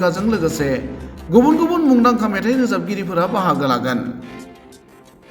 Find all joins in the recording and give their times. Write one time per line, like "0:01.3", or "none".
0:04.3